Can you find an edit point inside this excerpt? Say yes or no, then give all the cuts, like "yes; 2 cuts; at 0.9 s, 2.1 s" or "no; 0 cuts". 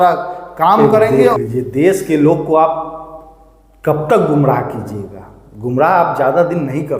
yes; 1 cut; at 1.1 s